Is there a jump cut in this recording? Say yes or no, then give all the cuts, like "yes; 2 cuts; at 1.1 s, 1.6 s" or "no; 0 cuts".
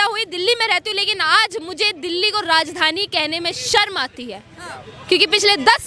no; 0 cuts